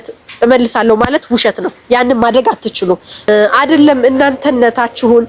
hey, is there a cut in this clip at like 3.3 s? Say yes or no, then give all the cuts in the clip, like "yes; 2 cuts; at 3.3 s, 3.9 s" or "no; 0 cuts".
yes; 1 cut; at 3.3 s